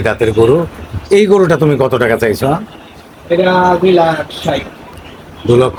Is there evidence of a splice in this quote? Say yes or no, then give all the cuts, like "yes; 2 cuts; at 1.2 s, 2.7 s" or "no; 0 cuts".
no; 0 cuts